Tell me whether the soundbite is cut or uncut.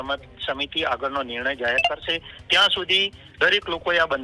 uncut